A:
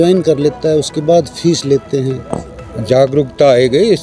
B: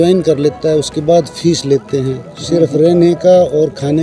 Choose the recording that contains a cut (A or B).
A